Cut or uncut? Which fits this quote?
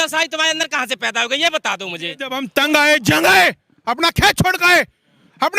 cut